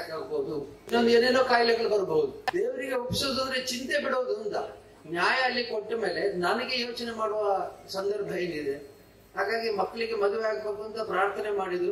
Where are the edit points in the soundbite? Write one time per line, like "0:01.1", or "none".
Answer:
0:00.9
0:02.4